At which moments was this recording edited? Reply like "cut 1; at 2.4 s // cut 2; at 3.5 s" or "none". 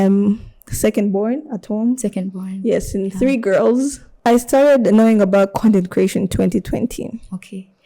cut 1; at 4.0 s